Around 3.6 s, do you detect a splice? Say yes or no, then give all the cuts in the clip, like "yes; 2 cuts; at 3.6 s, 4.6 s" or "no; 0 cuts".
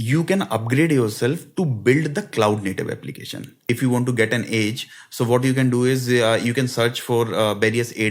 yes; 1 cut; at 3.6 s